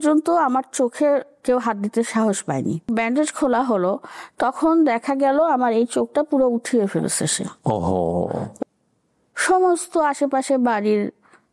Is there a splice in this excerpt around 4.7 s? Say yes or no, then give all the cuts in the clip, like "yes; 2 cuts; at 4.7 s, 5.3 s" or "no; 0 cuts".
no; 2 cuts; at 2.9 s, 8.5 s